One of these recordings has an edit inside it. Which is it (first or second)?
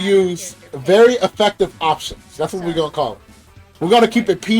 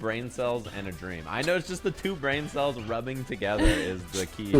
first